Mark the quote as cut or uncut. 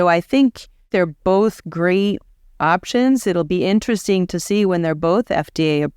cut